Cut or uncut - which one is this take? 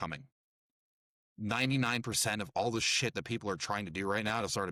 uncut